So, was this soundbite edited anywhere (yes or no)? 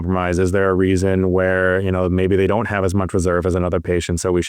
no